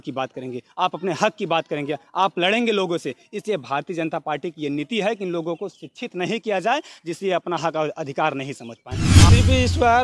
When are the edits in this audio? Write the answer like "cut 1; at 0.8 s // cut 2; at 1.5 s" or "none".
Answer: cut 1; at 9.1 s